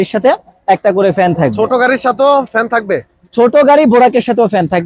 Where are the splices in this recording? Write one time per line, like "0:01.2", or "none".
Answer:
none